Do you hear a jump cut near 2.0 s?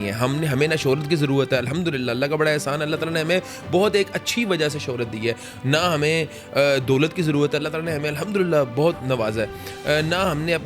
no; 0 cuts

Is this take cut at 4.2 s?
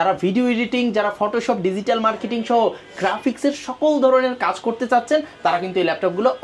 no; 0 cuts

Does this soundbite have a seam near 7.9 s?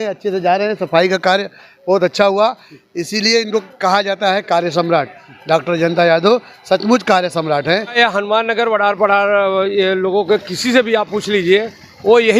yes; 1 cut; at 7.9 s

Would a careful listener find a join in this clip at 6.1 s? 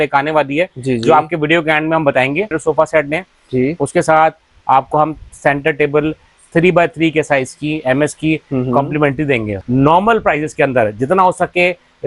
no; 2 cuts; at 2.5 s, 9.5 s

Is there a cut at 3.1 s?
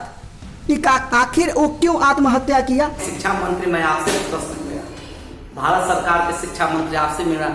yes; 1 cut; at 3.1 s

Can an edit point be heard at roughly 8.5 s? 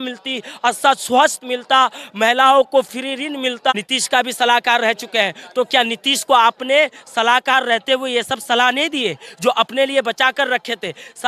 no; 1 cut; at 3.7 s

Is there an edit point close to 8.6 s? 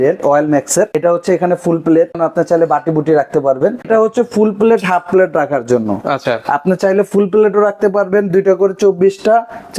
no; 3 cuts; at 0.9 s, 2.2 s, 3.9 s

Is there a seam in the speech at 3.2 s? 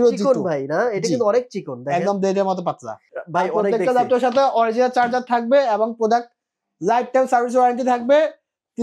yes; 1 cut; at 3.2 s

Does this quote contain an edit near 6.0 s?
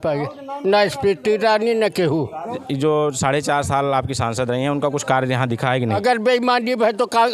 yes; 2 cuts; at 2.6 s, 6.0 s

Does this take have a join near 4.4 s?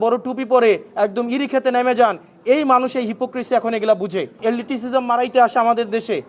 yes; 1 cut; at 4.4 s

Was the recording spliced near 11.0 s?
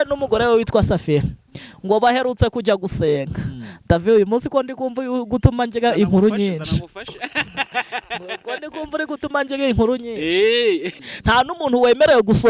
yes; 1 cut; at 11.0 s

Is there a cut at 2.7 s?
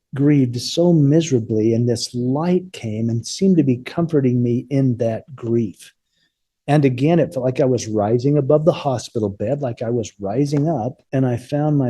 no; 1 cut; at 11.0 s

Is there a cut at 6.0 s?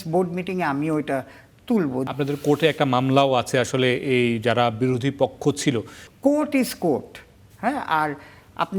yes; 2 cuts; at 2.1 s, 6.0 s

